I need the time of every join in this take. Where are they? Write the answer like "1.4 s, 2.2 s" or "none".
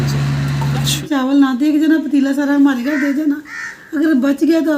0.9 s